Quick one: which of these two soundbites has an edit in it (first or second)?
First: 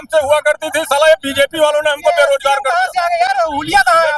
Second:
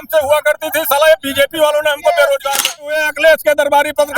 second